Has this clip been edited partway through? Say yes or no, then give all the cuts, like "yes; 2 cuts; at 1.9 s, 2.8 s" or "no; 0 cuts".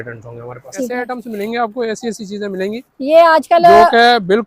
yes; 1 cut; at 0.9 s